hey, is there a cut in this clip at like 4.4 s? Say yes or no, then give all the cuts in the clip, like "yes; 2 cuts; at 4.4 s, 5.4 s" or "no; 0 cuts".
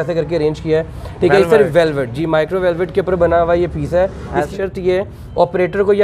yes; 1 cut; at 4.4 s